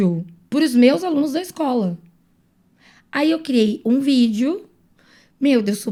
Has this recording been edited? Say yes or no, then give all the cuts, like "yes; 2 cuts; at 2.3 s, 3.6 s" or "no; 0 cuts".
no; 0 cuts